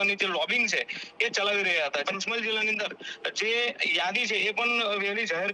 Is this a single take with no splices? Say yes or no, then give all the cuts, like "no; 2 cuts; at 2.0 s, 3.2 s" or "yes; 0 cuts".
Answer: no; 1 cut; at 2.0 s